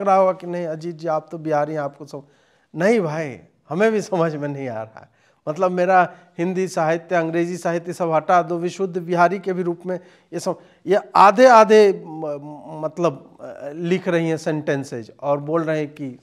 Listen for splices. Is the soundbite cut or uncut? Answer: uncut